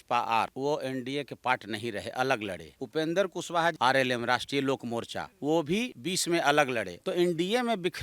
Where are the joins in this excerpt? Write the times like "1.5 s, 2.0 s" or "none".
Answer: 2.7 s, 3.8 s, 7.0 s